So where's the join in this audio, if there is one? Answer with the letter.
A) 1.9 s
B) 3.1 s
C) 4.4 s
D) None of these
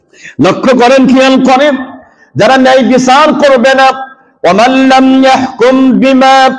D